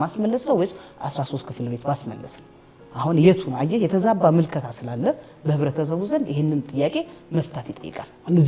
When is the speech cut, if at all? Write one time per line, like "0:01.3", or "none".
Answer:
none